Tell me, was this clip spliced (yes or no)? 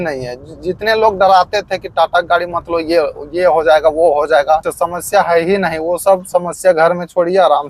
yes